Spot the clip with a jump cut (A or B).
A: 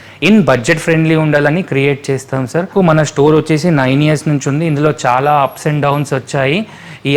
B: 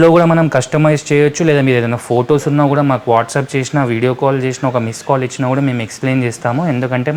A